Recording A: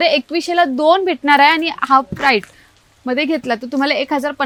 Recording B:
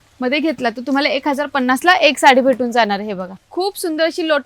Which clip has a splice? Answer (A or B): B